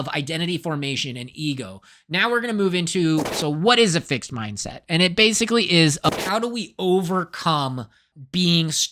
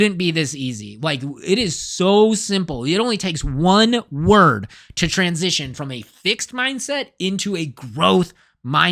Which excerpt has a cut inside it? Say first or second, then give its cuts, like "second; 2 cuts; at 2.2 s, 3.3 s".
first; 2 cuts; at 3.3 s, 6.1 s